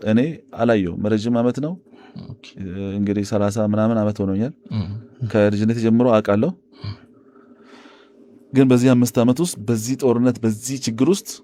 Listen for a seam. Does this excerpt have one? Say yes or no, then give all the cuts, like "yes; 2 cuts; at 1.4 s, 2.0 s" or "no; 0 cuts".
no; 0 cuts